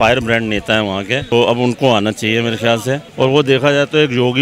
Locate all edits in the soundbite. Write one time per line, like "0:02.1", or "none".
0:01.3
0:03.1

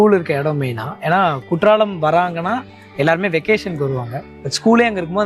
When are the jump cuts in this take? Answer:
none

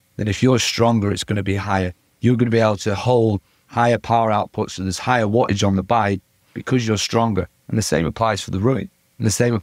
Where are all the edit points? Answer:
none

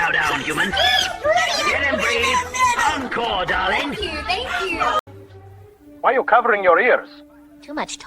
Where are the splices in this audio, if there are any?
0:05.1

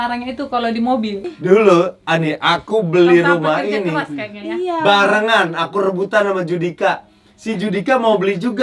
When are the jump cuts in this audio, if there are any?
0:01.2

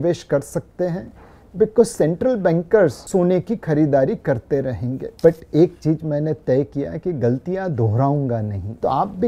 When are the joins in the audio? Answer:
0:05.1

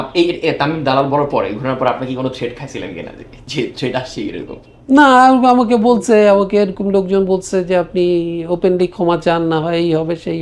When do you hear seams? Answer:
none

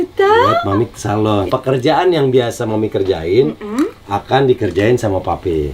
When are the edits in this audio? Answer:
0:01.4

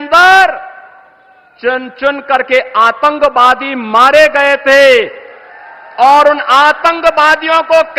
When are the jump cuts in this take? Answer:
none

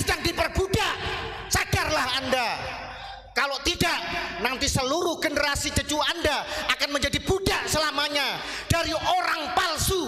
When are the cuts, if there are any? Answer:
none

